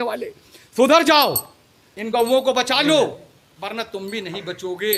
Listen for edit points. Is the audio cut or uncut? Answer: cut